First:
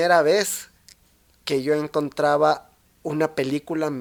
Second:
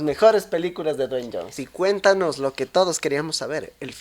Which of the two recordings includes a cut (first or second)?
second